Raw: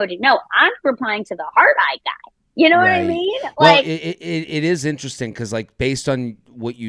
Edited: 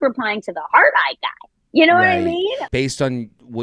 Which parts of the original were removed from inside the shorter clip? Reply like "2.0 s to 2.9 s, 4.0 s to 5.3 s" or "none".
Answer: 3.5 s to 5.7 s